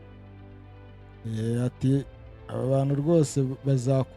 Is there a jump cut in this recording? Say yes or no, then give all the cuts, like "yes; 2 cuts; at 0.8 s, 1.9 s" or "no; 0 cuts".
no; 0 cuts